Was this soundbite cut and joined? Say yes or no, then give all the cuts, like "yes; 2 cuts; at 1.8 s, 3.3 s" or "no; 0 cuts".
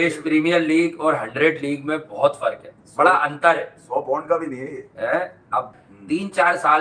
no; 0 cuts